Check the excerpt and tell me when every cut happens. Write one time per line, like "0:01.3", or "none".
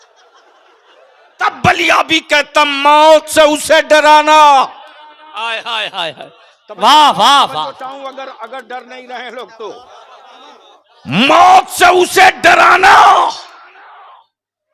0:01.4